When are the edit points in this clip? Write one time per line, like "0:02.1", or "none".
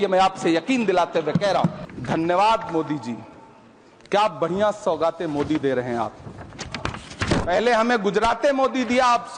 0:01.8